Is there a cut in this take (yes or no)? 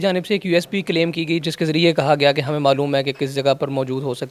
yes